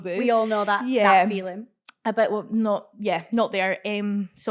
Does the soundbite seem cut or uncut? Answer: uncut